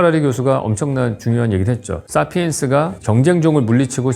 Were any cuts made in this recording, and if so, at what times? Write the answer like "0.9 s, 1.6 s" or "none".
2.0 s, 3.0 s